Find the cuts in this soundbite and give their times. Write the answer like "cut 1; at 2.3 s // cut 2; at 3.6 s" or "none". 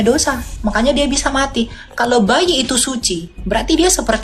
none